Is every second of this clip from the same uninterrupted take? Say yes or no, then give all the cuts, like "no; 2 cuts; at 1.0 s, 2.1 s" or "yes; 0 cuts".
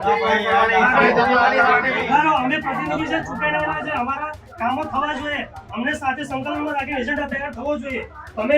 no; 1 cut; at 1.9 s